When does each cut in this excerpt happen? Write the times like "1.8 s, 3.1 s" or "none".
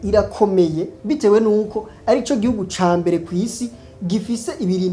0.9 s